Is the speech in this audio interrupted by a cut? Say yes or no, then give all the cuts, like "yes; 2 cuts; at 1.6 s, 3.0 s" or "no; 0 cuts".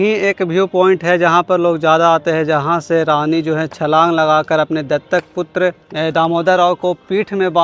no; 0 cuts